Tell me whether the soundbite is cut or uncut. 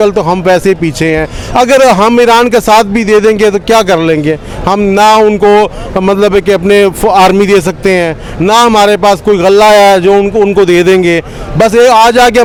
uncut